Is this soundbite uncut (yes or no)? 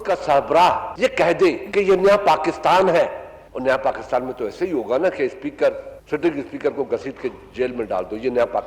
no